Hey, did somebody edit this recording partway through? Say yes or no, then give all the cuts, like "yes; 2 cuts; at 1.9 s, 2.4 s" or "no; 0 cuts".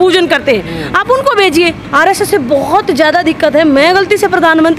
yes; 1 cut; at 1.8 s